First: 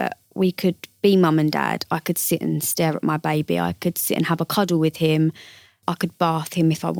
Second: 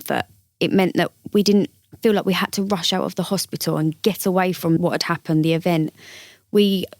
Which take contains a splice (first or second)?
second